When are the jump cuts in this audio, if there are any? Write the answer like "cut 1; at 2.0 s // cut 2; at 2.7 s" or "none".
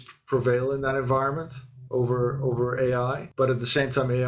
cut 1; at 3.2 s